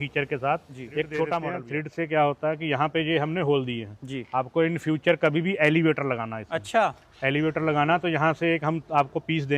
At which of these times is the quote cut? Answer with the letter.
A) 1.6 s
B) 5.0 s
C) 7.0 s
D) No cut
A